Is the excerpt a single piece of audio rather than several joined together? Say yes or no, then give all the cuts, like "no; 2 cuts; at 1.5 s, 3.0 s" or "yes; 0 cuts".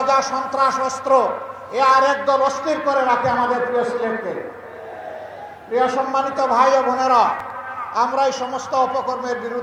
yes; 0 cuts